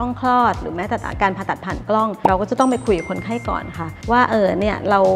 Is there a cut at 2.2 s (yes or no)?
yes